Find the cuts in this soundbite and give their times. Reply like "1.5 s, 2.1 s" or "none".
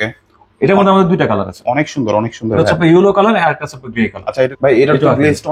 4.5 s